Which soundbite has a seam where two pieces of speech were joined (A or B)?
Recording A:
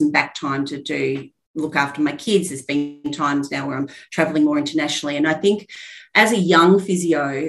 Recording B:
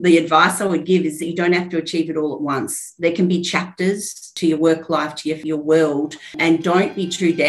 B